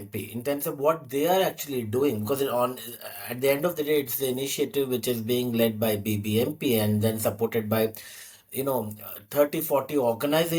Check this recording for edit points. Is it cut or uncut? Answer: uncut